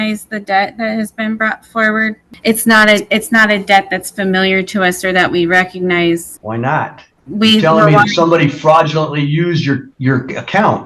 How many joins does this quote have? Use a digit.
2